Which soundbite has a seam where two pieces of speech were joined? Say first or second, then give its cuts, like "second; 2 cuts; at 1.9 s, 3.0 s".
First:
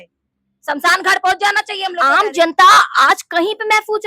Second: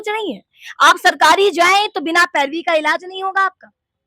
first; 1 cut; at 2.0 s